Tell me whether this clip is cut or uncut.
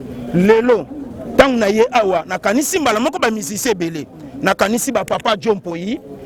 uncut